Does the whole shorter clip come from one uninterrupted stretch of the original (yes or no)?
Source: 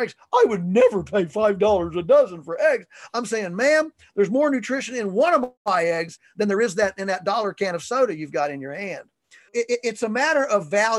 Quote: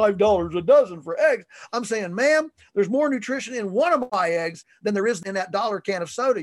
no